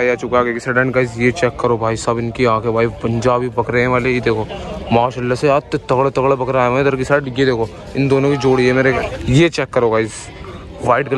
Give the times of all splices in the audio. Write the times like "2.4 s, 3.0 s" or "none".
9.0 s